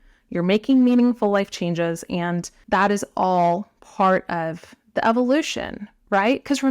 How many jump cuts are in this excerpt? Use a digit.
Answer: 1